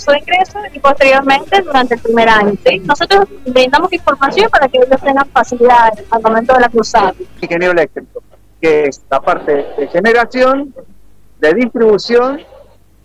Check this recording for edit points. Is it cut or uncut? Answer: cut